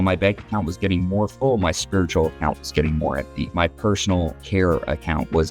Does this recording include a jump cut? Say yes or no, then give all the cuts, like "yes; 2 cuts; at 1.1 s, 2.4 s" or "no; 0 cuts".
yes; 2 cuts; at 3.4 s, 4.4 s